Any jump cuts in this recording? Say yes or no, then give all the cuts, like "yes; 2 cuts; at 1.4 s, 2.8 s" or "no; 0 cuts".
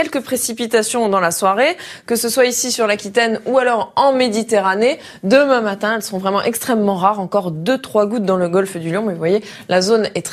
yes; 1 cut; at 6.4 s